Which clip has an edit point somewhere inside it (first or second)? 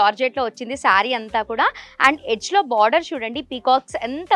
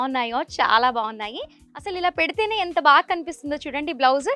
second